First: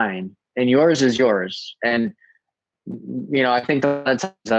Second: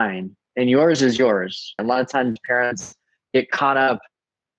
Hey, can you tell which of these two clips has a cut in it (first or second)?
second